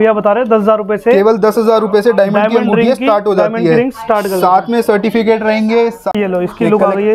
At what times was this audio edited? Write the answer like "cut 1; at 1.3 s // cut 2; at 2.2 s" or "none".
cut 1; at 6.1 s